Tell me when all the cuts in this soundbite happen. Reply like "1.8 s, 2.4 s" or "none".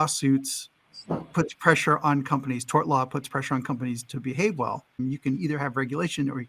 5.0 s